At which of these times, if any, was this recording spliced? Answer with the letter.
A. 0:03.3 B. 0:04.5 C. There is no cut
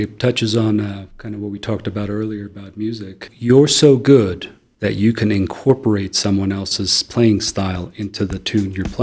A